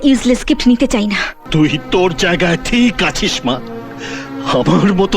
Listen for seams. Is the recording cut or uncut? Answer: cut